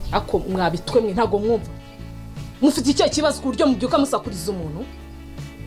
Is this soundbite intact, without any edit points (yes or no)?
yes